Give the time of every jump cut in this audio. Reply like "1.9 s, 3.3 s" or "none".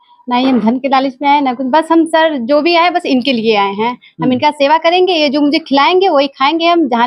none

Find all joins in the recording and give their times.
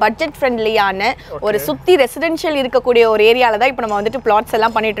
none

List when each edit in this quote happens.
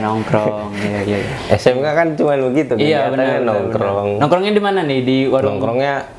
none

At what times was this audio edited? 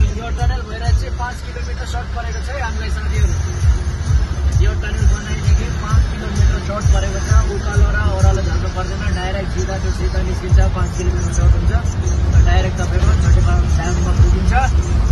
none

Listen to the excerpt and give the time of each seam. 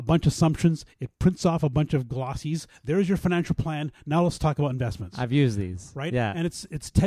none

